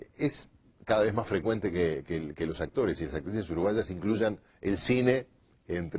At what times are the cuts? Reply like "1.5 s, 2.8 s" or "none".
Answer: 3.7 s